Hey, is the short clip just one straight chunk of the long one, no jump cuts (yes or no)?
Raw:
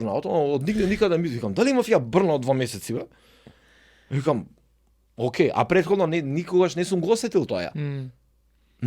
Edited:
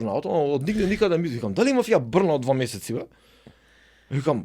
yes